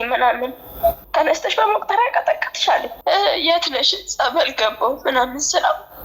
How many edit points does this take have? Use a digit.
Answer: 2